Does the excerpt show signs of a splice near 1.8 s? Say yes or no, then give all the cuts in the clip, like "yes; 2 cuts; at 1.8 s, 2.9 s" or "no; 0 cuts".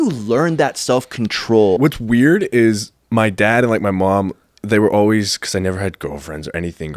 yes; 1 cut; at 1.8 s